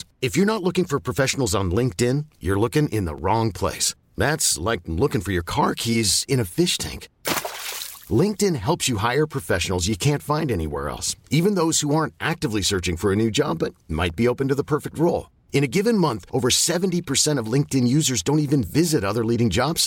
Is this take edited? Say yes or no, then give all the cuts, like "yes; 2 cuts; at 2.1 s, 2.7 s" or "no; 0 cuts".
no; 0 cuts